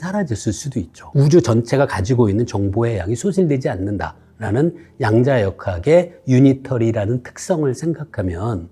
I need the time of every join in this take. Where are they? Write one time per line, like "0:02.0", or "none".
none